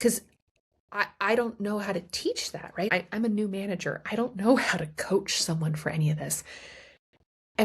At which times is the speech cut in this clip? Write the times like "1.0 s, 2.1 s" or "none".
2.9 s